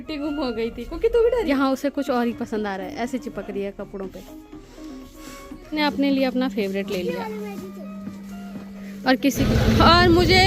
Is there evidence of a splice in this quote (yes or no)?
yes